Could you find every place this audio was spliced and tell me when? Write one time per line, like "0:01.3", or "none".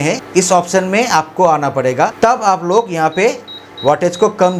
none